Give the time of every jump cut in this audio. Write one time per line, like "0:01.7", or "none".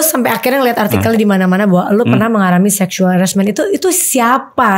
none